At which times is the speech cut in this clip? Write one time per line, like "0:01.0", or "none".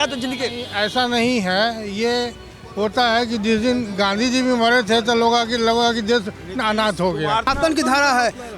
0:07.5